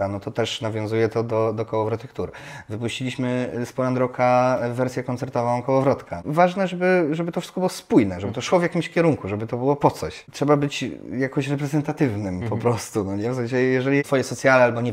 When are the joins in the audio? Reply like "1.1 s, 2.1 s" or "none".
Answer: 6.2 s, 10.2 s, 14.1 s